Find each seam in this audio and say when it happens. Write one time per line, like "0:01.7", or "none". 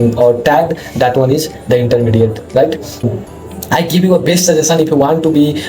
0:03.1